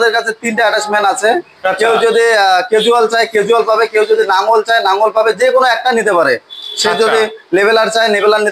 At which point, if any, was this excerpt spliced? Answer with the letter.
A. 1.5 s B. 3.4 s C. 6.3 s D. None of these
D